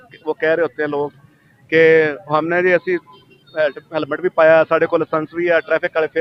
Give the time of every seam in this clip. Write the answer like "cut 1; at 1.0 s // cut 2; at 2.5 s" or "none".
none